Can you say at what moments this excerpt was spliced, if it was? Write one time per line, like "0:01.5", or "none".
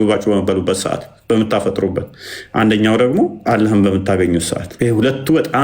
0:03.4
0:04.6